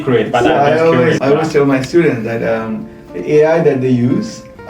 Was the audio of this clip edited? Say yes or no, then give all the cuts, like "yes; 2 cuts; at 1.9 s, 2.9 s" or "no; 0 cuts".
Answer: no; 0 cuts